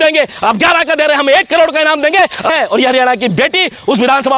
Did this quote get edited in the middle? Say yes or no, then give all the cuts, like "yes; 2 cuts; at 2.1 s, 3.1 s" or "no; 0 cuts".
yes; 1 cut; at 2.5 s